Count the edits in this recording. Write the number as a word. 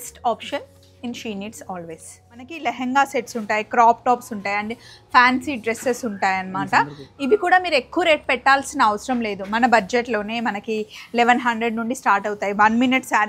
one